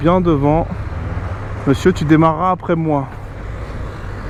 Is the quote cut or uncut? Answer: uncut